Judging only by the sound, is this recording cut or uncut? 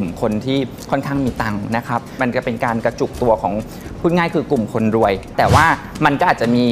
cut